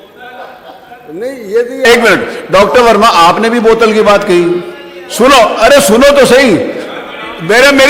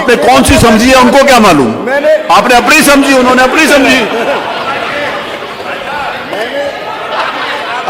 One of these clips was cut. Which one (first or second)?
first